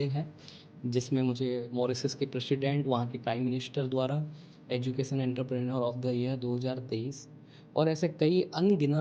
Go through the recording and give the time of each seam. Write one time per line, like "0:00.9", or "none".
none